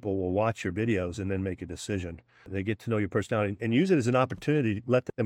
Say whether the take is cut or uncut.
cut